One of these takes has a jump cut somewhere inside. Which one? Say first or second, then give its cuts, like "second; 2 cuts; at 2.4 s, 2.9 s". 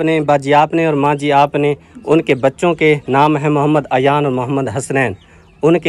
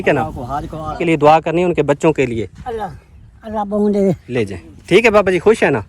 second; 2 cuts; at 1.0 s, 4.2 s